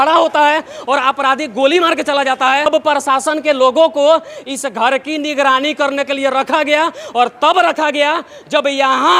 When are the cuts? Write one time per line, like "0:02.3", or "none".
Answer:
0:02.7